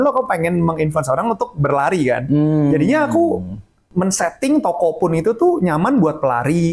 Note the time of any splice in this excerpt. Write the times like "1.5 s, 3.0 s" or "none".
3.9 s